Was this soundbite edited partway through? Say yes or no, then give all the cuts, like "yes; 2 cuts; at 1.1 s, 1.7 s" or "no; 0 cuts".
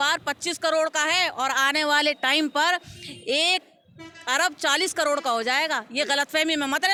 no; 0 cuts